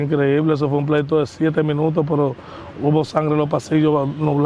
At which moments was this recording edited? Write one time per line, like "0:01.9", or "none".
none